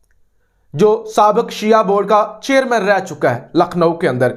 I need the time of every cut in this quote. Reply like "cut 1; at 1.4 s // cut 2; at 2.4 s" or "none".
none

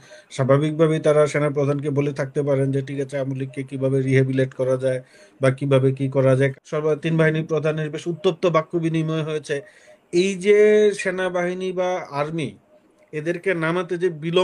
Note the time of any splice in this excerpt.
cut 1; at 6.5 s

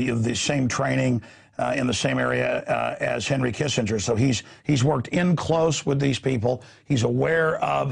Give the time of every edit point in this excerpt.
none

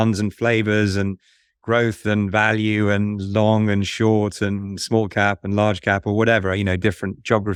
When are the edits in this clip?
none

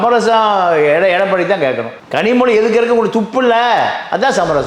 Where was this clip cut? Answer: none

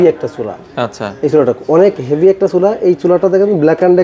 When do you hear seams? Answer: none

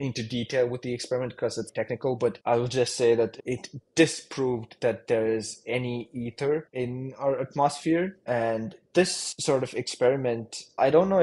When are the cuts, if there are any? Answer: cut 1; at 3.4 s

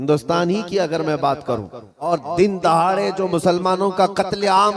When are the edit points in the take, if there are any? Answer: cut 1; at 2.1 s

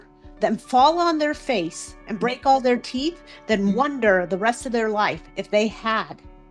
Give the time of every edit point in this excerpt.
none

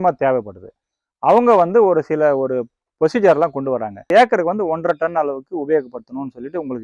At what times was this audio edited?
cut 1; at 4.1 s

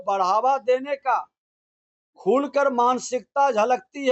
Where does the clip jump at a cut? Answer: none

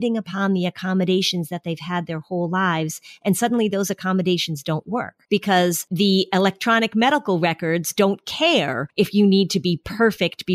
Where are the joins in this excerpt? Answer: cut 1; at 5.2 s // cut 2; at 5.9 s // cut 3; at 8.8 s

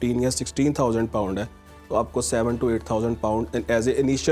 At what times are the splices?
none

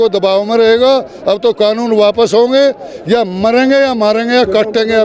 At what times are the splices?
none

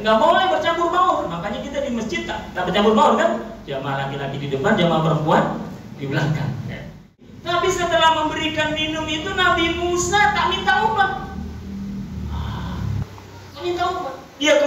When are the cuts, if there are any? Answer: cut 1; at 7.3 s

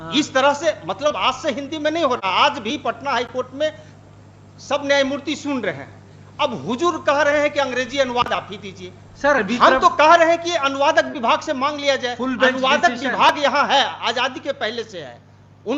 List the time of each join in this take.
none

